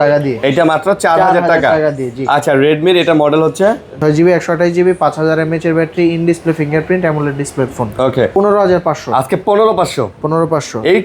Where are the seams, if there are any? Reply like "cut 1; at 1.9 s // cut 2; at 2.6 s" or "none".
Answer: cut 1; at 4.0 s // cut 2; at 8.3 s